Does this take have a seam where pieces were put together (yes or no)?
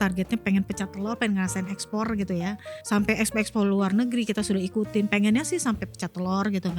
yes